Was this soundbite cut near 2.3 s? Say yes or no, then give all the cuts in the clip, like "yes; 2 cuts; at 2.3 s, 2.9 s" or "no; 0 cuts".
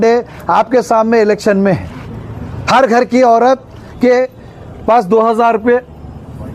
no; 0 cuts